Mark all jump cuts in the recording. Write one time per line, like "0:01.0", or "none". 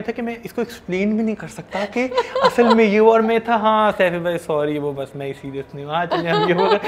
none